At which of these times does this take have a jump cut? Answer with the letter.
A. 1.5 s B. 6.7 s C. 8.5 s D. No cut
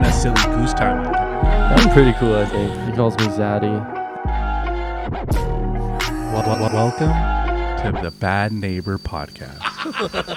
D